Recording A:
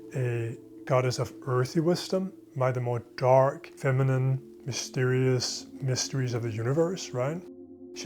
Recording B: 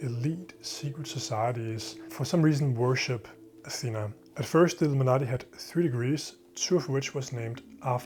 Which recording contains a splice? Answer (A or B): A